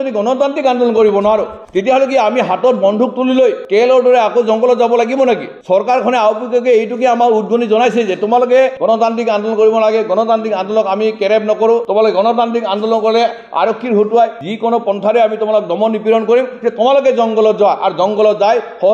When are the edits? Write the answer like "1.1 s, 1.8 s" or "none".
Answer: none

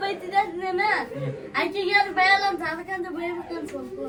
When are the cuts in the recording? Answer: none

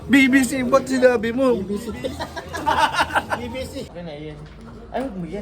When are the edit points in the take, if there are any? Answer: 3.9 s

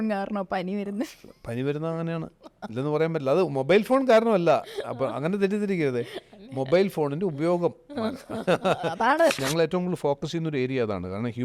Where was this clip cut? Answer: 9.4 s

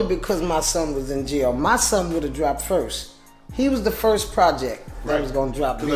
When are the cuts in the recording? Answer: none

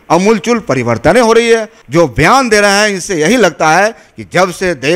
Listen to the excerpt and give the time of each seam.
1.8 s

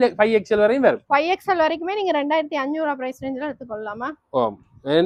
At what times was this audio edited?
none

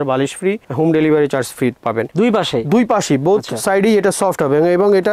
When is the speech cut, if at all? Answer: 2.1 s

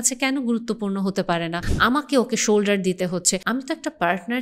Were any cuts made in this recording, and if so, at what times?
1.6 s, 3.4 s

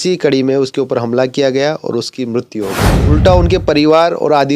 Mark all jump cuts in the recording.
2.9 s

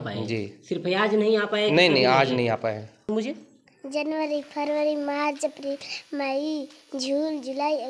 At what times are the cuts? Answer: 3.1 s

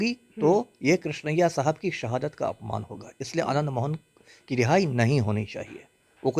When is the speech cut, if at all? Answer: none

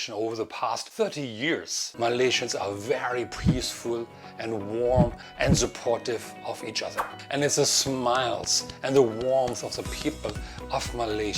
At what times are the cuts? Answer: 1.8 s

